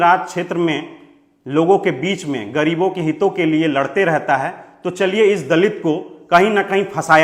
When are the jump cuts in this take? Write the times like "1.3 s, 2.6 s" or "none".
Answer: none